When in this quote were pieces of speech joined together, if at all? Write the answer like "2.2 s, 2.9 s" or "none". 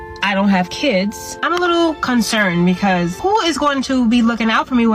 1.3 s, 3.2 s